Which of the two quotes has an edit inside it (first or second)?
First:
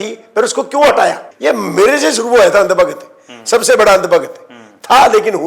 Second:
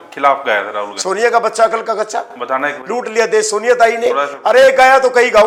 first